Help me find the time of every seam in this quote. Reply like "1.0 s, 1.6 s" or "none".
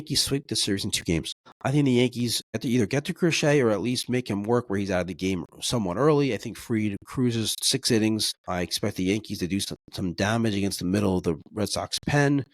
1.4 s, 2.6 s, 8.3 s, 9.7 s